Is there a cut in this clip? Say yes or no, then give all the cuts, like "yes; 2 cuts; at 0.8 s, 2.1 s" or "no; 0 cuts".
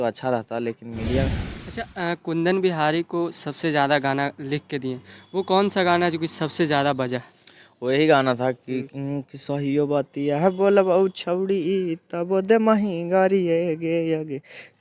yes; 1 cut; at 1.3 s